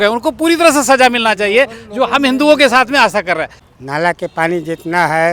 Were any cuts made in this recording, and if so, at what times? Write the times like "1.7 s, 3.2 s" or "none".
none